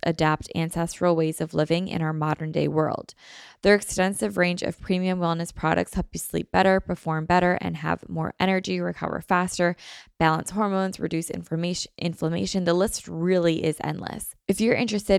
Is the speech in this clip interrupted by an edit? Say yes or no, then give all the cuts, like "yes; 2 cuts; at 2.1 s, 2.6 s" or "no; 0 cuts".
yes; 1 cut; at 14.3 s